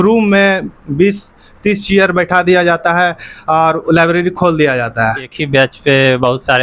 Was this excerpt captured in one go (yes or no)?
no